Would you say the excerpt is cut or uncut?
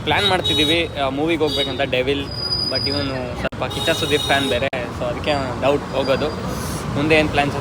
uncut